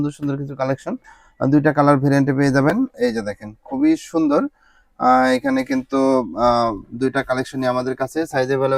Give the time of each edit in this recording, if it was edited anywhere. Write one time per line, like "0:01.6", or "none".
none